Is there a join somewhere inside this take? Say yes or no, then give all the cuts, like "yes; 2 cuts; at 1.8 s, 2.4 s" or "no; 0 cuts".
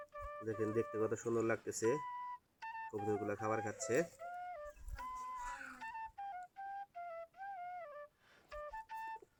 no; 0 cuts